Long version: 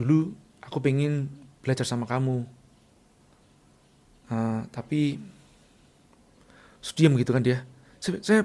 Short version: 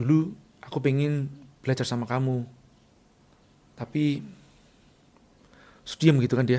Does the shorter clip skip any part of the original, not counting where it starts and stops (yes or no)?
yes